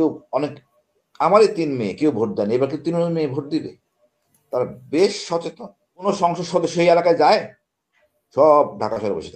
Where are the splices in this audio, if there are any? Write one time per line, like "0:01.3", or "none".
0:06.1